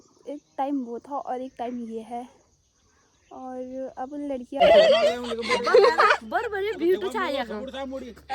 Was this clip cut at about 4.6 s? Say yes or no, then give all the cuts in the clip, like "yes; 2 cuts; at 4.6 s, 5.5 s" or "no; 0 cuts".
yes; 1 cut; at 4.6 s